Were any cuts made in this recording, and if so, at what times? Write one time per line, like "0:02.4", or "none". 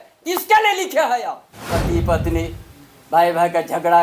0:01.5